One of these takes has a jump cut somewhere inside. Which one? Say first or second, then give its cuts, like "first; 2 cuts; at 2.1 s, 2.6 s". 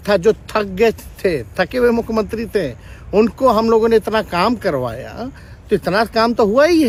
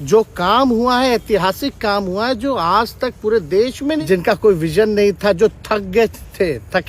second; 1 cut; at 4.0 s